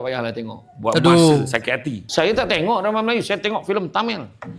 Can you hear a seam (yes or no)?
yes